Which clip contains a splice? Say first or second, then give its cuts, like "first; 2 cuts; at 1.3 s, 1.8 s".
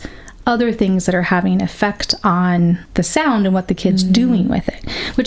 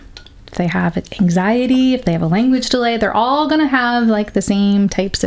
first; 1 cut; at 2.9 s